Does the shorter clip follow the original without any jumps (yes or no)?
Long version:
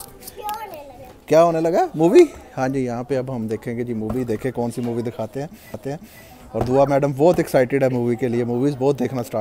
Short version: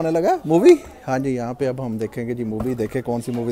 yes